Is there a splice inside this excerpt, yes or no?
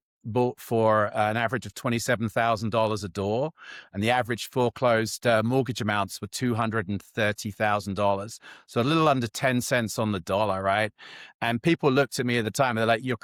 no